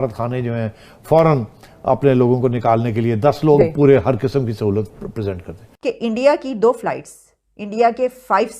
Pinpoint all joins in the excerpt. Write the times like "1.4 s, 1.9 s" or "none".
5.7 s